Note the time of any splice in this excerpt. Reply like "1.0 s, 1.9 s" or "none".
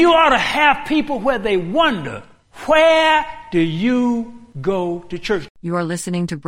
5.4 s